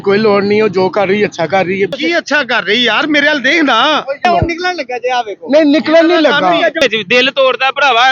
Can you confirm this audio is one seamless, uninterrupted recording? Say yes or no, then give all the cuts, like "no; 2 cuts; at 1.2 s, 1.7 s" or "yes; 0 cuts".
no; 3 cuts; at 1.9 s, 4.2 s, 6.8 s